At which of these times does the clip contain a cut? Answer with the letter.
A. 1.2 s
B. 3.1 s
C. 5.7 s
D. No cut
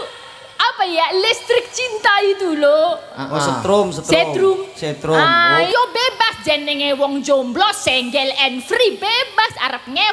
C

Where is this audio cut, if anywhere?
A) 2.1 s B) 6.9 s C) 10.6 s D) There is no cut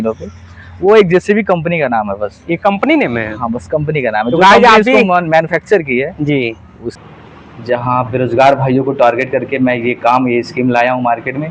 B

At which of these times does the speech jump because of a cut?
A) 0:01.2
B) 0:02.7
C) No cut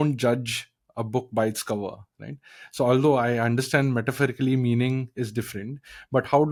C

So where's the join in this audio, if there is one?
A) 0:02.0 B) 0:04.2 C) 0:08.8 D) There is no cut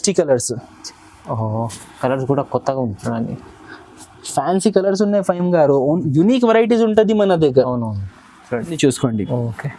C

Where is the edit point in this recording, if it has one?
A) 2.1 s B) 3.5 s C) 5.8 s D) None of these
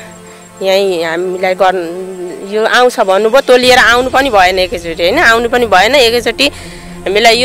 D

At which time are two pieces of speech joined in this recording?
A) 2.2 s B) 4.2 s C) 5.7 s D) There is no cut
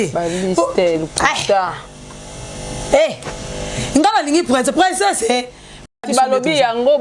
C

